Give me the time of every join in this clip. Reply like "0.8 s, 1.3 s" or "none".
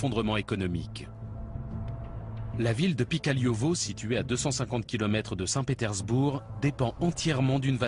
none